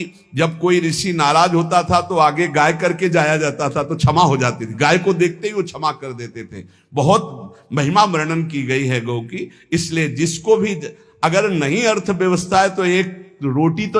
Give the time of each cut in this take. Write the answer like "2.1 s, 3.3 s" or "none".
none